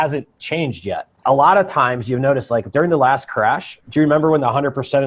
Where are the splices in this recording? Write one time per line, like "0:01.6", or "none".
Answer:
0:01.1
0:03.7